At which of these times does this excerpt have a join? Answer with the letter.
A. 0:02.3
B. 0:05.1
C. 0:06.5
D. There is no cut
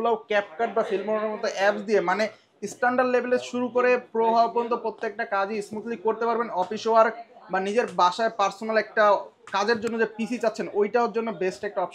D